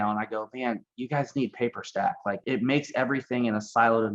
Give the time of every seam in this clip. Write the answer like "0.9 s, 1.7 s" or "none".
2.4 s